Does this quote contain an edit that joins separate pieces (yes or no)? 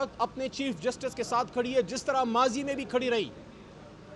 no